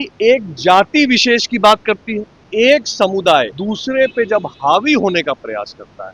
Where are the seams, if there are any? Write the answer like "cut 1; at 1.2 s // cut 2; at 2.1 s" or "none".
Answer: cut 1; at 2.4 s // cut 2; at 3.6 s